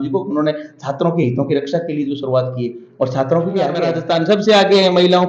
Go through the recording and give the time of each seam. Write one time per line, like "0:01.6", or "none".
0:04.3